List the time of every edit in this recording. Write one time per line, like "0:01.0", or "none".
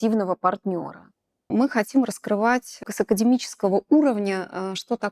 0:01.5